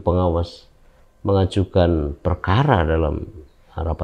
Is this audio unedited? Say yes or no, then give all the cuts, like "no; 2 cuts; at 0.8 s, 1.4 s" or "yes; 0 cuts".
yes; 0 cuts